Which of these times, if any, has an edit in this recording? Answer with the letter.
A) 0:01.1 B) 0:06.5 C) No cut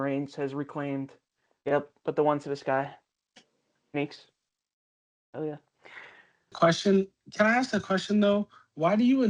B